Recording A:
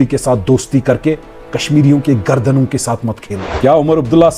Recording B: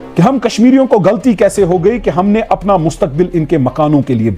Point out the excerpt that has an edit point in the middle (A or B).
A